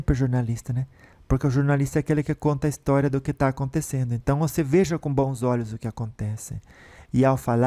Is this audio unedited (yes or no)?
yes